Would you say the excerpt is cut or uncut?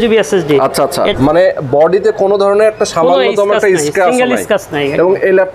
cut